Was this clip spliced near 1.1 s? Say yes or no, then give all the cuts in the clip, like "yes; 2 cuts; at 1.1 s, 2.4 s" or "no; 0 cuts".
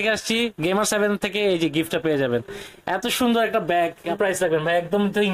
no; 1 cut; at 4.2 s